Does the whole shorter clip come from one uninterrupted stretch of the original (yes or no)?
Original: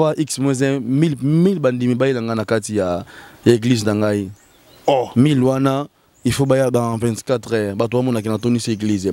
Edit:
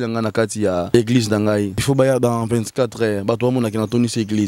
no